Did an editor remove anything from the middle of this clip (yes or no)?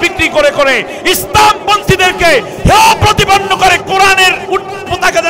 no